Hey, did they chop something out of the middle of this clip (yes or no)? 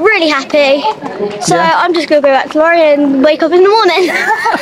no